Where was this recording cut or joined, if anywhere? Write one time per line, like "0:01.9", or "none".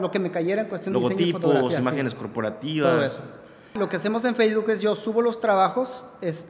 0:03.7